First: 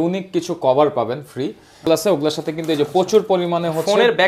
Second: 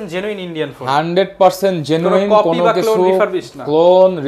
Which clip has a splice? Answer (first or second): first